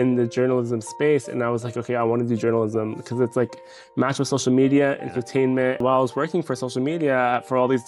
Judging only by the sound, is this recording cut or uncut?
cut